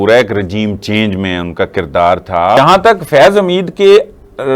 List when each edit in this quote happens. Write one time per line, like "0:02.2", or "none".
0:02.6